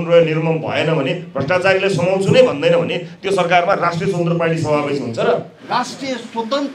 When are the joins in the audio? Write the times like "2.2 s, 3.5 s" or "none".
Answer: 5.5 s